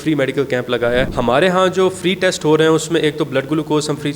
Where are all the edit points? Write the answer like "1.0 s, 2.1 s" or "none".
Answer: 1.1 s